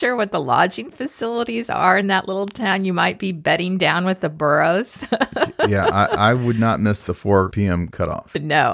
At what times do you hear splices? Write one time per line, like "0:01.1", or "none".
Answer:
0:07.7